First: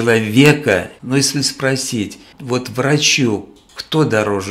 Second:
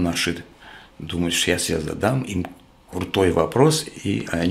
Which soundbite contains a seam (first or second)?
first